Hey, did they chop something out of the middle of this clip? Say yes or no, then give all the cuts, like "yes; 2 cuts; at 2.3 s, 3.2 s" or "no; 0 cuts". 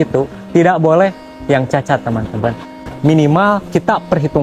yes; 1 cut; at 2.7 s